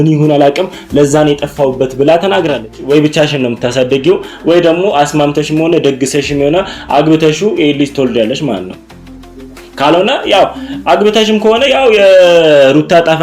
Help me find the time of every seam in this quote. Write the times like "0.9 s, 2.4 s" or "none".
2.8 s